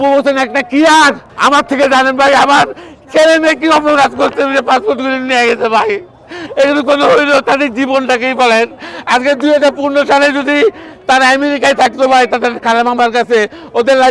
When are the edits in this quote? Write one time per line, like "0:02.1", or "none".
0:01.3